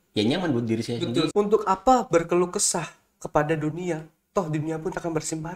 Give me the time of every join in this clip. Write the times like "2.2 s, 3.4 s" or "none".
1.3 s

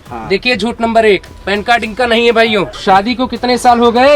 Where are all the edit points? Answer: 2.7 s

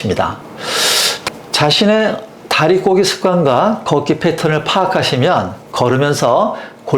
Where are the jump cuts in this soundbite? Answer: 1.2 s

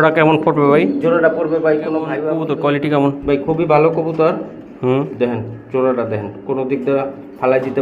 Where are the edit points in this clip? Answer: 2.4 s

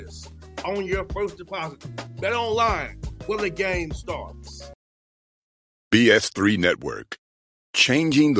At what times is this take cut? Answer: 4.7 s

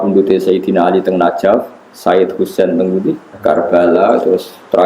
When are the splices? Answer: 3.3 s

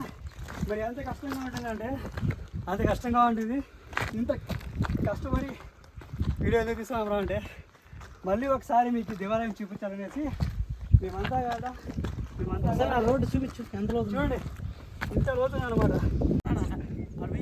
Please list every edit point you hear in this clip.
16.4 s

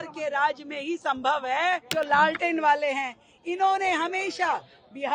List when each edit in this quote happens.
1.9 s

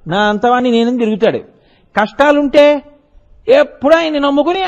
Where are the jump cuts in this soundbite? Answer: none

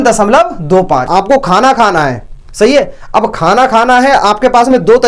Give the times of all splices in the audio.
1.0 s

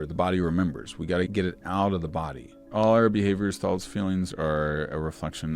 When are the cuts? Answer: 1.3 s, 2.7 s

